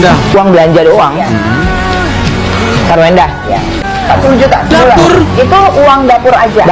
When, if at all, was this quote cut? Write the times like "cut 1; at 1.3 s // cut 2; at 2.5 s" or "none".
cut 1; at 3.8 s